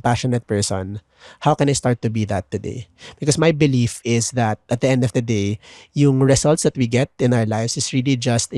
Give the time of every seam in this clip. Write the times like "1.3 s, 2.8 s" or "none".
none